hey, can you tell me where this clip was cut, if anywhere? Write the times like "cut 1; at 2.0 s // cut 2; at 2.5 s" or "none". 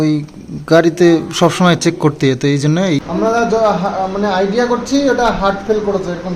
cut 1; at 3.0 s